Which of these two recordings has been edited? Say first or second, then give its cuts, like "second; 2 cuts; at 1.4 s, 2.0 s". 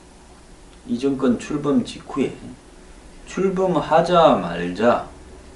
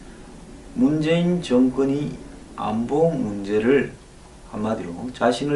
second; 1 cut; at 2.1 s